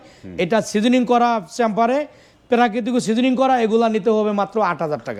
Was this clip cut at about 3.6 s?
no; 0 cuts

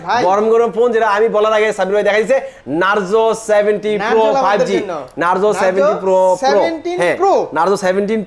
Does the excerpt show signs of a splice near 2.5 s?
no; 0 cuts

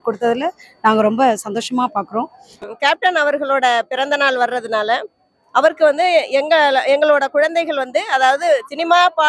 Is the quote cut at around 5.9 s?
no; 1 cut; at 2.6 s

